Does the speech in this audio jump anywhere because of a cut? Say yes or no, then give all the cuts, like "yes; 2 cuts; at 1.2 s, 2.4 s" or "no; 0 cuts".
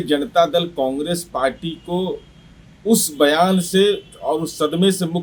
no; 0 cuts